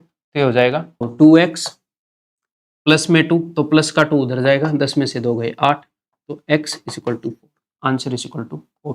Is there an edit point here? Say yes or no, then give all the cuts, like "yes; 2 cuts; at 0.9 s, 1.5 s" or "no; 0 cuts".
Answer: yes; 1 cut; at 1.1 s